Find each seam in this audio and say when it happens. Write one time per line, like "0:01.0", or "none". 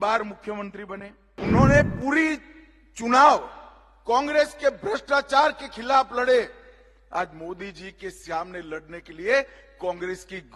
0:01.2